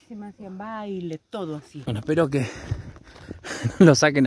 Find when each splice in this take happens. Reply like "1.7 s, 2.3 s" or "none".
1.7 s